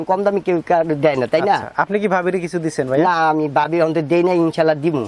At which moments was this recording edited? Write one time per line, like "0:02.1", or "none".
none

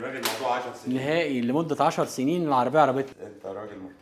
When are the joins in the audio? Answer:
0:03.1

